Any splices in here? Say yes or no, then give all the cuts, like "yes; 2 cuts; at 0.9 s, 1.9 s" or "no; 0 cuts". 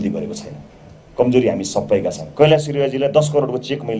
yes; 1 cut; at 2.2 s